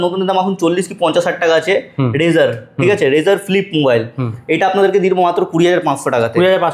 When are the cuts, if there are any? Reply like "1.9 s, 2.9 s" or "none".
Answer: none